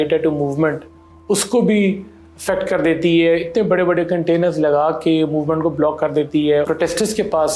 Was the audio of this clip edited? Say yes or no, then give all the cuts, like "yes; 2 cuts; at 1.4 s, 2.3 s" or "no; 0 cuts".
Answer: yes; 1 cut; at 6.7 s